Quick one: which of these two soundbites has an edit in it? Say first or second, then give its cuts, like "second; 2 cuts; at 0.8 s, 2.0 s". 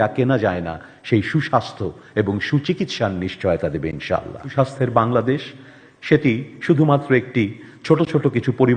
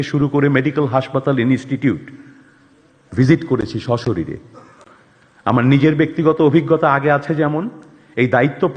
first; 1 cut; at 4.5 s